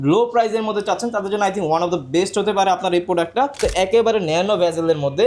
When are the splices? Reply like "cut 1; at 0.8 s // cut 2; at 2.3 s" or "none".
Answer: cut 1; at 3.6 s